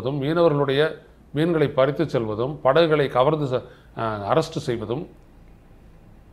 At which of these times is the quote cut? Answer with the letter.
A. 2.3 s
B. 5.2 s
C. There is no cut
C